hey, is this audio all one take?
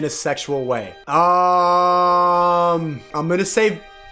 no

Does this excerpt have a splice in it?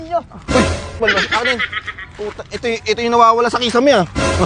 yes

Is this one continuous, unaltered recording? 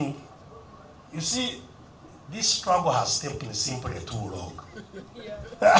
yes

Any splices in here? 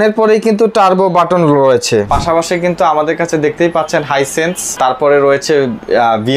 yes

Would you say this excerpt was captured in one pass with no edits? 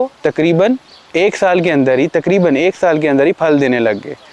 yes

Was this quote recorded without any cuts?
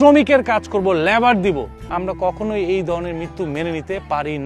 no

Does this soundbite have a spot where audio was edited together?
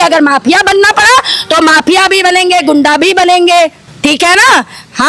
no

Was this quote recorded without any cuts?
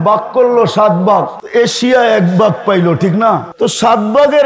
no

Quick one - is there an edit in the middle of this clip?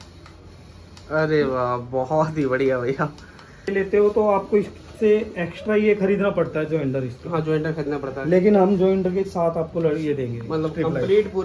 yes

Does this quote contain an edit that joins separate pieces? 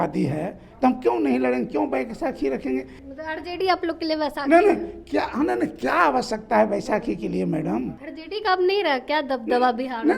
yes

